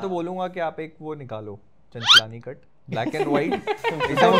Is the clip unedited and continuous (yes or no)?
yes